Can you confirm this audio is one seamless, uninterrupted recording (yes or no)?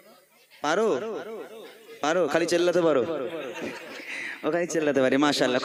yes